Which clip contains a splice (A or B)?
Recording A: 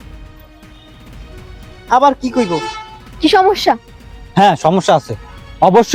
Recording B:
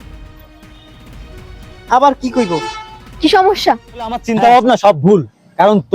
B